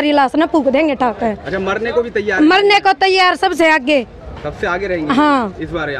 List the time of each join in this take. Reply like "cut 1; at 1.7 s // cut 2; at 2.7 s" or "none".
none